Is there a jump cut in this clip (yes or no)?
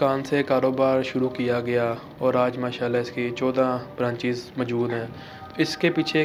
no